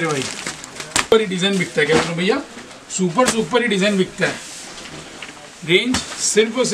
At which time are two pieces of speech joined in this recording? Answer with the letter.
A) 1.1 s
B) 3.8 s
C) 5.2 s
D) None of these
A